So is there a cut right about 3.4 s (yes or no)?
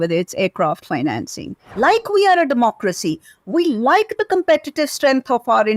no